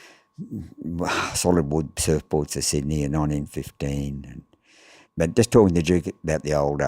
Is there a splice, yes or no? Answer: yes